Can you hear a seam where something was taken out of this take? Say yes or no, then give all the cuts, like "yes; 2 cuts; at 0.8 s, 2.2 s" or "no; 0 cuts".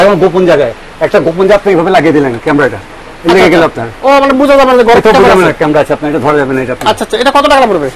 no; 0 cuts